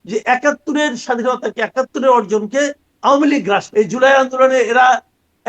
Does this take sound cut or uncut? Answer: cut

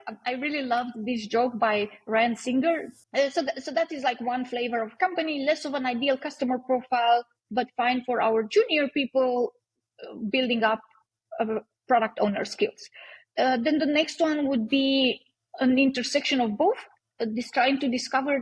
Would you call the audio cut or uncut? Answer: cut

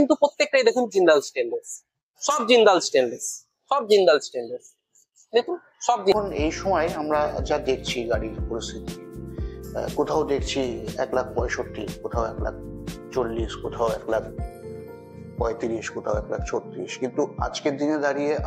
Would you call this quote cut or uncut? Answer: cut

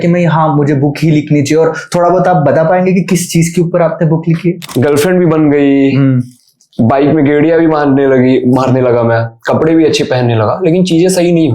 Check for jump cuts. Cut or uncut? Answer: cut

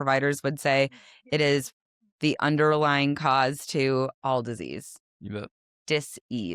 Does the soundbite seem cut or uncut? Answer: uncut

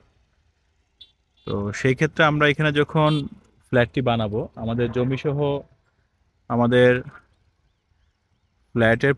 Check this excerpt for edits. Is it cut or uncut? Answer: uncut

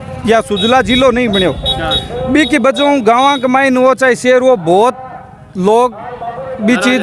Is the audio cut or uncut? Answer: uncut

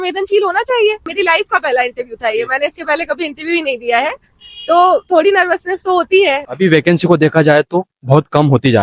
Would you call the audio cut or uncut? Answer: cut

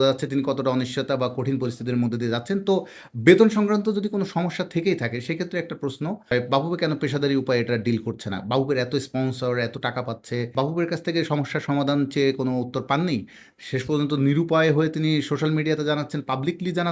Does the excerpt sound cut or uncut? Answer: cut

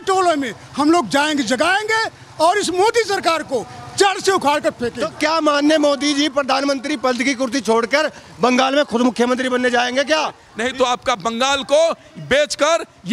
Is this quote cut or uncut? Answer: cut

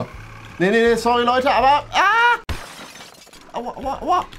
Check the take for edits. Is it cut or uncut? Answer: uncut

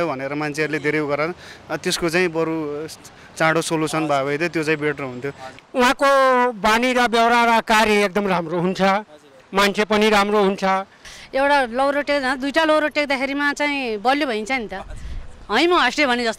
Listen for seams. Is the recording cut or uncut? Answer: cut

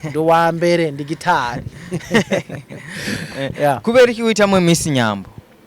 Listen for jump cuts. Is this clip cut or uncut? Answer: uncut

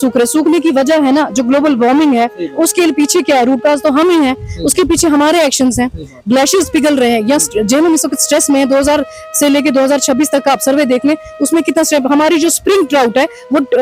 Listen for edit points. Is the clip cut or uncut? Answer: uncut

